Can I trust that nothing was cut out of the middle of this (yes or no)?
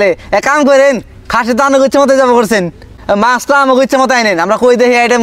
no